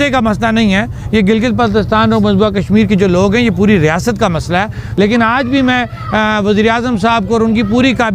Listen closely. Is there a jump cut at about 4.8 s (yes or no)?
yes